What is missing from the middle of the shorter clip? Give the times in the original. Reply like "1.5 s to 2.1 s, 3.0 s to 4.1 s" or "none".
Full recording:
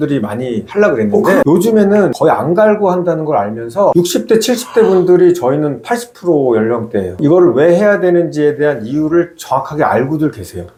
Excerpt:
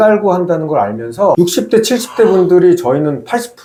none

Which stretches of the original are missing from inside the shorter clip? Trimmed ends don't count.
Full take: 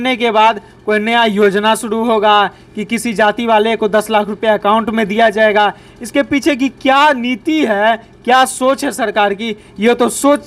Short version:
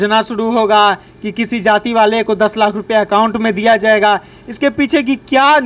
none

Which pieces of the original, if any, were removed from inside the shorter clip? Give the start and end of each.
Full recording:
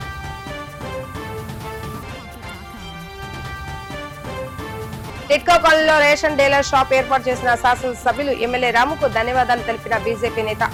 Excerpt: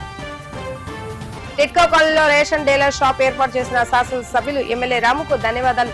1.6 s to 5.1 s

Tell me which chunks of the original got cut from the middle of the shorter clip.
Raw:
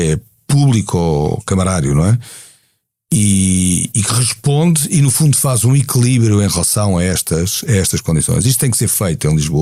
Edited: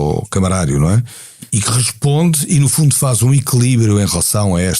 2.7 s to 3.9 s

